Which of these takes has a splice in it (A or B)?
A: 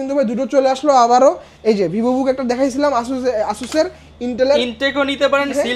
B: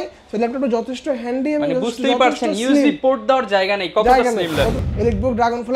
B